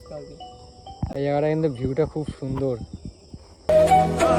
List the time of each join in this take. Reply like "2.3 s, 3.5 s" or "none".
none

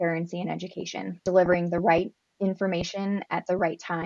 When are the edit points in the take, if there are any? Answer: 1.1 s

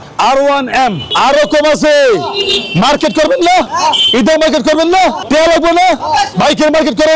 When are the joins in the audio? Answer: 1.1 s, 3.7 s

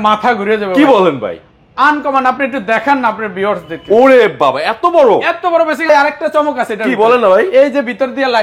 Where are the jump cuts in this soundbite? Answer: 5.9 s

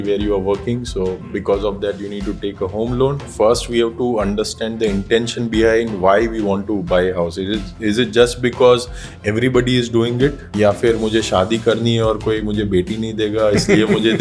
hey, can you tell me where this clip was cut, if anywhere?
3.3 s, 10.4 s

